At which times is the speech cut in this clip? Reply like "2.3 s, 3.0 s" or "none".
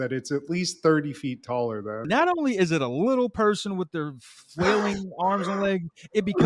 2.0 s